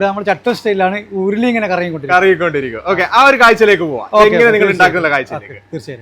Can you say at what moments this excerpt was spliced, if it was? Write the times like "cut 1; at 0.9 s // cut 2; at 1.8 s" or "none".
none